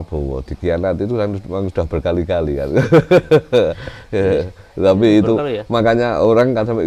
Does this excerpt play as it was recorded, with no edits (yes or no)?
yes